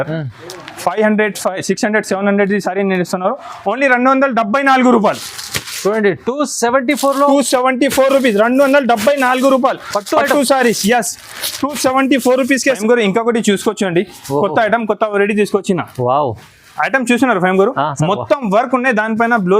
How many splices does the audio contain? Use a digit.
1